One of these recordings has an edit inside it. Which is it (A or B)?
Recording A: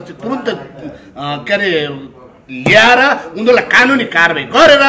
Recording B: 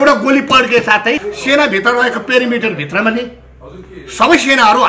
B